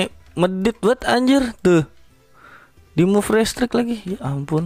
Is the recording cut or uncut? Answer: uncut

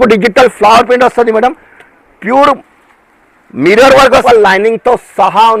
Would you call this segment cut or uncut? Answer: cut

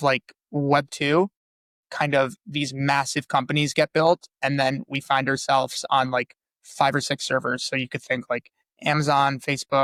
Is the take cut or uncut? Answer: uncut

